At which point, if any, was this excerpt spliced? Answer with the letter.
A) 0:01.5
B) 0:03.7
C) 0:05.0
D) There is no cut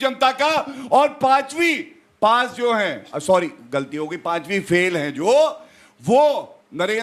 D